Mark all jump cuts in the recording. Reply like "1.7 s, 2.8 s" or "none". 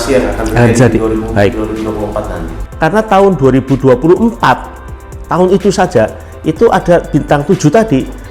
2.5 s